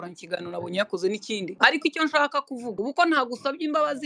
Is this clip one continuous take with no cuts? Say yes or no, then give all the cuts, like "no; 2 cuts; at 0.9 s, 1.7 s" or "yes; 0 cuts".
no; 2 cuts; at 1.5 s, 2.6 s